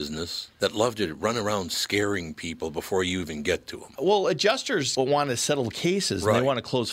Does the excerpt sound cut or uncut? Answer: uncut